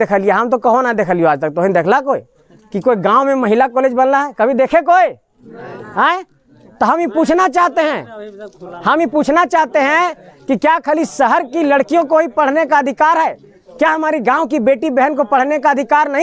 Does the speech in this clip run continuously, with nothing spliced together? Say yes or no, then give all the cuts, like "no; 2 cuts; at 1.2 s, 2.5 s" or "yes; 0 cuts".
yes; 0 cuts